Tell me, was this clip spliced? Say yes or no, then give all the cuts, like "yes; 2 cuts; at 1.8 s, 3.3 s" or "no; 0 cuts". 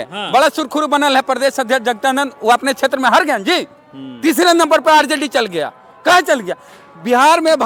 no; 0 cuts